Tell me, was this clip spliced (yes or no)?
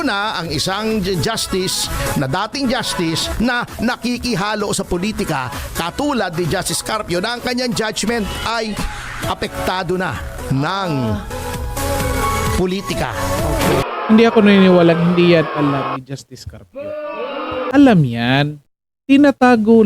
yes